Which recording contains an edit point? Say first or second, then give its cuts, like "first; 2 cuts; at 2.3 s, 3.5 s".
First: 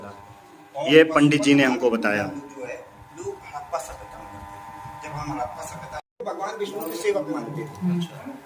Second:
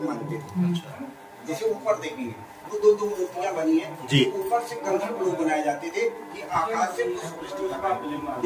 first; 1 cut; at 6.1 s